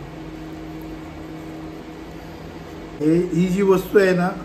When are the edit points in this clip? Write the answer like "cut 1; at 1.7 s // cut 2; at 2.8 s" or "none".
cut 1; at 3.0 s